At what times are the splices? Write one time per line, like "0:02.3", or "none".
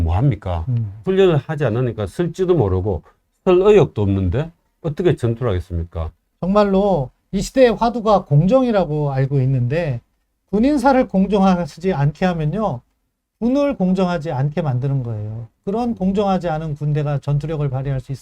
0:01.0